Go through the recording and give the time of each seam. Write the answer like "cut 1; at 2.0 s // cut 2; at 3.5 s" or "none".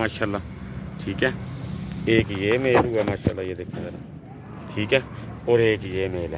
none